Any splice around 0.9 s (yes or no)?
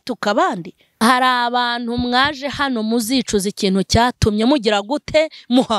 yes